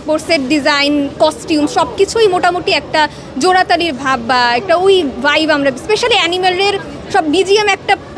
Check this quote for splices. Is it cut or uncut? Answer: uncut